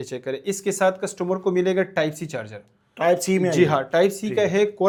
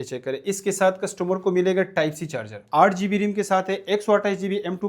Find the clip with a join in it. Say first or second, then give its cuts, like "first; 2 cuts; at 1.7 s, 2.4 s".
second; 1 cut; at 2.6 s